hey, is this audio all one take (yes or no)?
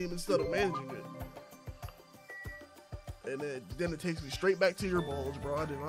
yes